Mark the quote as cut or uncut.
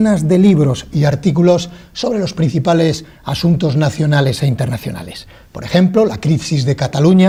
uncut